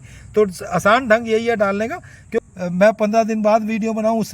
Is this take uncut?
no; 1 cut; at 2.5 s

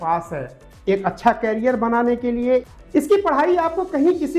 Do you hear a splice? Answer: yes; 1 cut; at 2.6 s

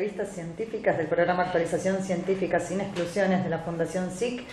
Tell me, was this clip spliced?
no; 0 cuts

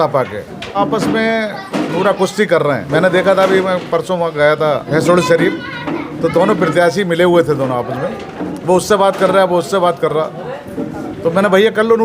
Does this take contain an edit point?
yes; 4 cuts; at 0.8 s, 2.8 s, 4.9 s, 6.1 s

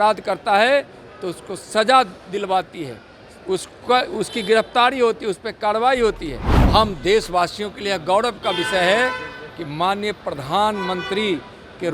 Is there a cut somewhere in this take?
yes; 1 cut; at 6.5 s

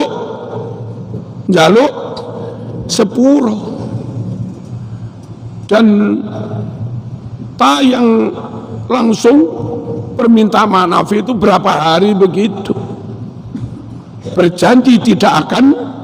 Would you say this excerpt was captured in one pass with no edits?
yes; 0 cuts

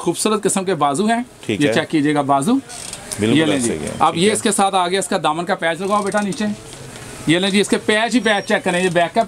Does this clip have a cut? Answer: no; 0 cuts

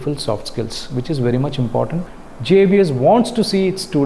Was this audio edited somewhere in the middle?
yes; 1 cut; at 2.0 s

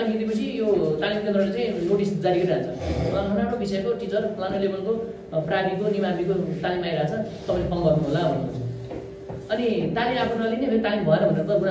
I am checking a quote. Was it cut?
no; 0 cuts

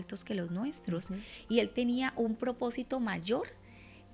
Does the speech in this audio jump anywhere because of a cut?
no; 0 cuts

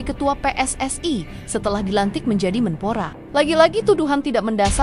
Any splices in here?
no; 0 cuts

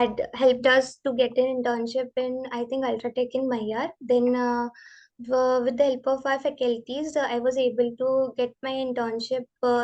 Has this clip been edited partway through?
no; 0 cuts

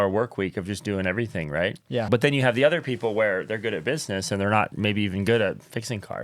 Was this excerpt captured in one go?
no; 1 cut; at 2.1 s

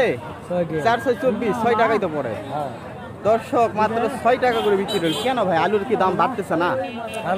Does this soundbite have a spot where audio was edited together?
no; 0 cuts

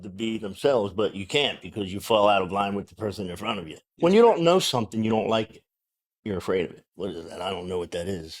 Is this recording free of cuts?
no; 2 cuts; at 3.9 s, 6.8 s

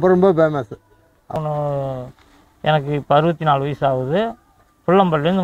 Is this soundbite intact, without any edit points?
no; 1 cut; at 1.4 s

